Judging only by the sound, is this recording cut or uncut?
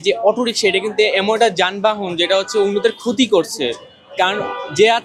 uncut